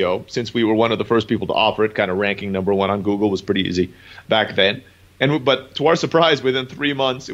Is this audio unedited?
yes; 0 cuts

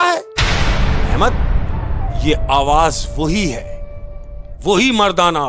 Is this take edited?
no; 0 cuts

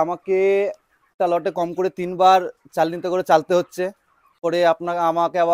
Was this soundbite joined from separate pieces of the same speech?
yes; 2 cuts; at 1.1 s, 4.4 s

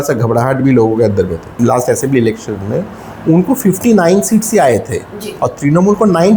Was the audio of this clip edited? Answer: yes; 1 cut; at 1.5 s

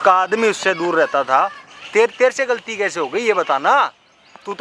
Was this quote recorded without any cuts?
yes; 0 cuts

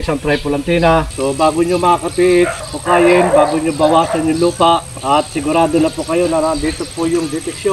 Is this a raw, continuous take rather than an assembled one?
no; 3 cuts; at 1.1 s, 2.6 s, 4.9 s

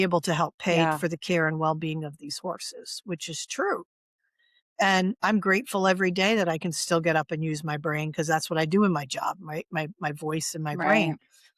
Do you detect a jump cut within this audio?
no; 0 cuts

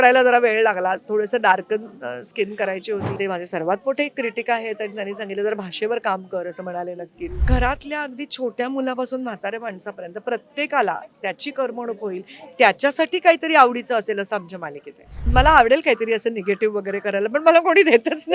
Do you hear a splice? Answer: yes; 3 cuts; at 3.2 s, 7.4 s, 15.3 s

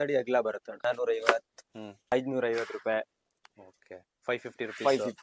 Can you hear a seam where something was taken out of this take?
yes; 2 cuts; at 0.8 s, 2.1 s

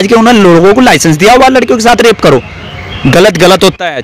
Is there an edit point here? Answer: no; 0 cuts

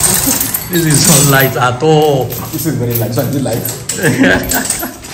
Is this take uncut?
yes; 0 cuts

